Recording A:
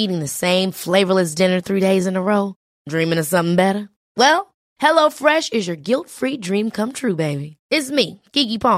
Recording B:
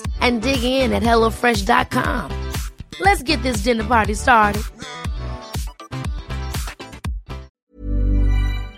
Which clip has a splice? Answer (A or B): B